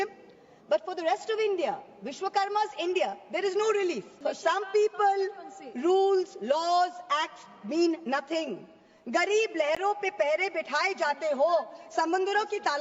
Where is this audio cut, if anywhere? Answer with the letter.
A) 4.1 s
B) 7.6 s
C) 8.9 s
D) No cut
A